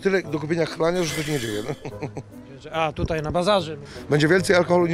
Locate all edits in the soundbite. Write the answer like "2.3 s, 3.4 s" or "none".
3.8 s